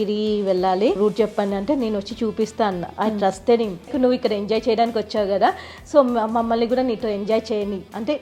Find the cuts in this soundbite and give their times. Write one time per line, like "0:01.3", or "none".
0:01.0
0:03.9